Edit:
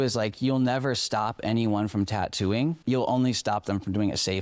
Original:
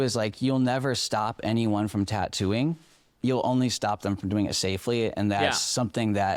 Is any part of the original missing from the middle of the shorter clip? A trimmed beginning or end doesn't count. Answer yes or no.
yes